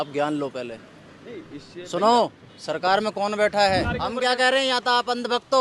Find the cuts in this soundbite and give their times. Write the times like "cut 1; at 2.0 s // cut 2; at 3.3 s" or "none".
cut 1; at 3.9 s